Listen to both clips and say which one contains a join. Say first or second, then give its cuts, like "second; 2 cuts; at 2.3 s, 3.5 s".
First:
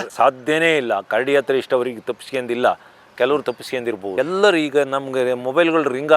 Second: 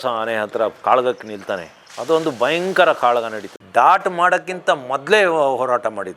second; 2 cuts; at 0.8 s, 3.5 s